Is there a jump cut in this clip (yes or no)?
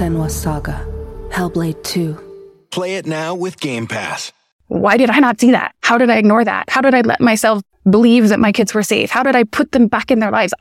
yes